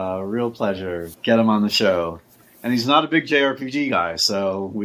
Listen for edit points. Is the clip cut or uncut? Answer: cut